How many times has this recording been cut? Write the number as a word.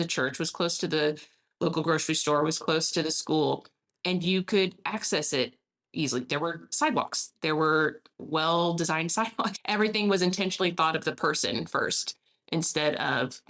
zero